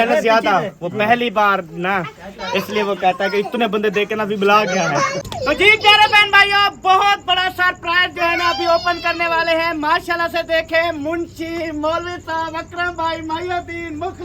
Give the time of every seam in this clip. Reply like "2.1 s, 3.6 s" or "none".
5.2 s